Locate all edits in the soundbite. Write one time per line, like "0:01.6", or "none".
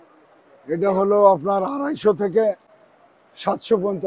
none